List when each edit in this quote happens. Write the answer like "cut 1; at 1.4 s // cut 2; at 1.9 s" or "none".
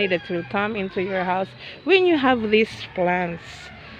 none